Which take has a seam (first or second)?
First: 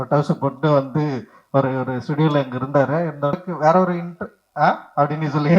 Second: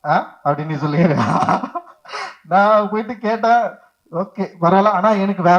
first